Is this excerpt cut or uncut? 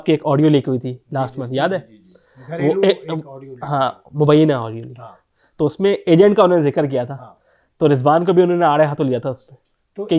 uncut